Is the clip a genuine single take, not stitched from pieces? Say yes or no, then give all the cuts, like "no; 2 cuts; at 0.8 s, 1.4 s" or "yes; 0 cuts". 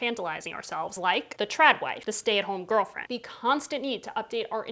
no; 3 cuts; at 1.0 s, 2.0 s, 3.0 s